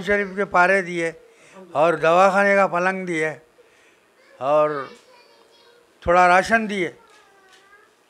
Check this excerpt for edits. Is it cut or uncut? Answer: uncut